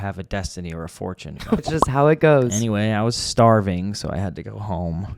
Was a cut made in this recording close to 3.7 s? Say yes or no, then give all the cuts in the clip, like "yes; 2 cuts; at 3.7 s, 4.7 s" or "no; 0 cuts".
no; 1 cut; at 1.6 s